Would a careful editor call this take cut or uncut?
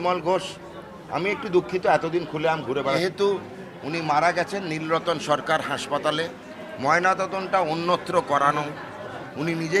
cut